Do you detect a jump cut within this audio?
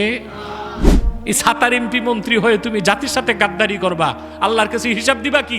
yes; 1 cut; at 1.1 s

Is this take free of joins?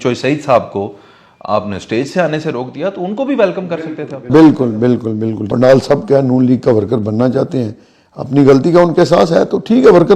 no; 1 cut; at 5.4 s

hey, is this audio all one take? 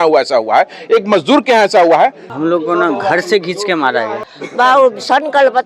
no; 2 cuts; at 2.3 s, 4.2 s

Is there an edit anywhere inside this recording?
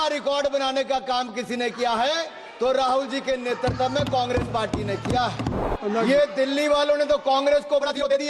yes; 1 cut; at 5.6 s

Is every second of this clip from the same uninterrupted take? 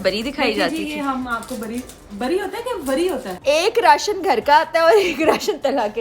no; 1 cut; at 3.3 s

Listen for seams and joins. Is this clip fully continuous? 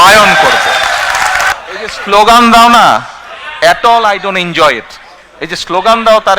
no; 1 cut; at 1.5 s

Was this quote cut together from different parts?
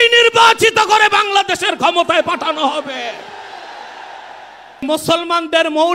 yes; 1 cut; at 4.8 s

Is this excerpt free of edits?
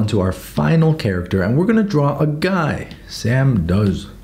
yes; 0 cuts

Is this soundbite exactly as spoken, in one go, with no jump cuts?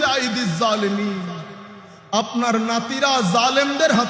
yes; 0 cuts

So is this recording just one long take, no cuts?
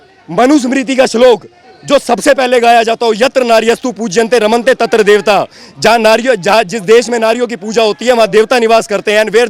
yes; 0 cuts

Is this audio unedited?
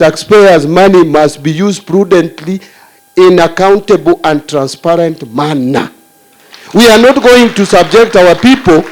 yes; 0 cuts

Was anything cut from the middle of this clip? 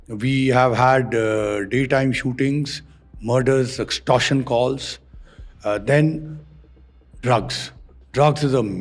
no; 0 cuts

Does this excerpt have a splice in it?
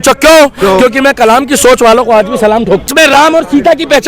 yes; 1 cut; at 2.9 s

